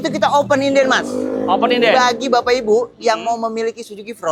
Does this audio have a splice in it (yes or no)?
no